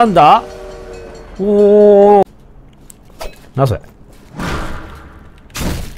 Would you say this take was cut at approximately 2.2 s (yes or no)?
yes